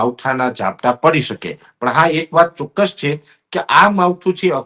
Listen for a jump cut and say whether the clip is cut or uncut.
uncut